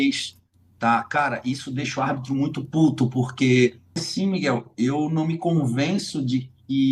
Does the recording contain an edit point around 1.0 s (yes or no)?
no